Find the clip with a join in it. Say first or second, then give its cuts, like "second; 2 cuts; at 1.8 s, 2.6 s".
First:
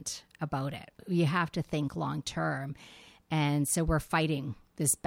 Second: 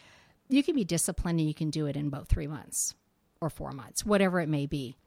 first; 1 cut; at 1.0 s